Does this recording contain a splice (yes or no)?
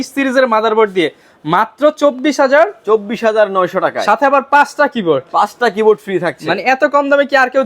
no